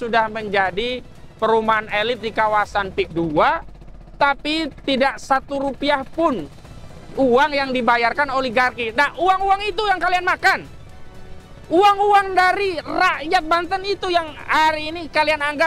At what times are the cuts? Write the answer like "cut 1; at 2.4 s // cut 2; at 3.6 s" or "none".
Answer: none